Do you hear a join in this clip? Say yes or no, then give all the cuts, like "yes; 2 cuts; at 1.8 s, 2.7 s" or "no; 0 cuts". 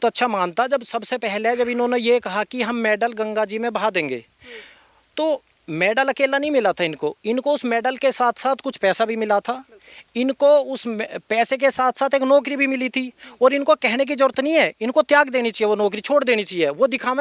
no; 0 cuts